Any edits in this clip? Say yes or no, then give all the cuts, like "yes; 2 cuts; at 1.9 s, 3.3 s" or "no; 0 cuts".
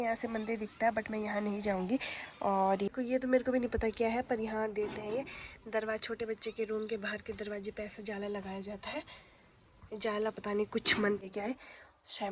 yes; 2 cuts; at 2.9 s, 11.2 s